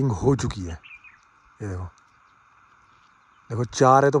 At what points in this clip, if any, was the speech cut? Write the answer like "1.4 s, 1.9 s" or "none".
none